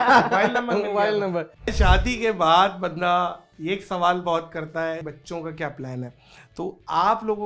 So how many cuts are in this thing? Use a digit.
2